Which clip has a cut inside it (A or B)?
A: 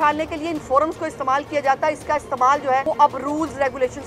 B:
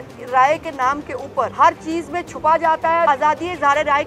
B